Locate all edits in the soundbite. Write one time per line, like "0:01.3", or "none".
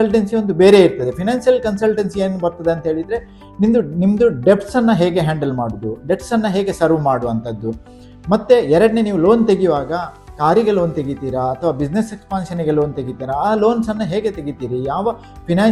none